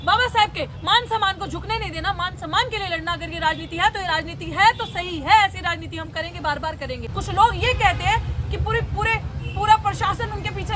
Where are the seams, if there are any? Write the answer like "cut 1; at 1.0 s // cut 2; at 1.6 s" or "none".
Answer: cut 1; at 7.1 s